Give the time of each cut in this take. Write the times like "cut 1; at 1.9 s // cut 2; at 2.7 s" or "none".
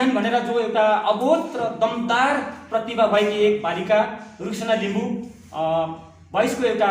none